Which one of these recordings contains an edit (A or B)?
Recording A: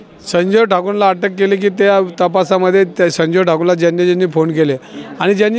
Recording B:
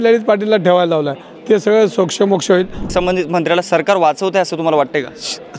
B